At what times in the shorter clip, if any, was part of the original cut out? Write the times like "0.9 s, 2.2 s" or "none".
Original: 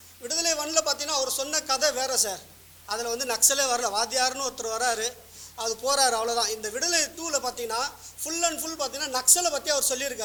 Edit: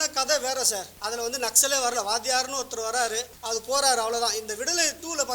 0.9 s, 3.3 s